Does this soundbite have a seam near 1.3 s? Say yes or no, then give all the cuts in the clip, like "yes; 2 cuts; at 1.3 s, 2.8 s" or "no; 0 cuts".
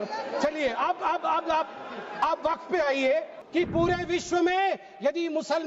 no; 1 cut; at 3.4 s